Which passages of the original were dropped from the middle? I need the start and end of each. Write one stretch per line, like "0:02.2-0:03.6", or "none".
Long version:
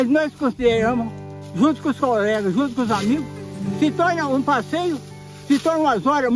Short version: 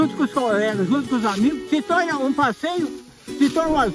0:03.3-0:03.7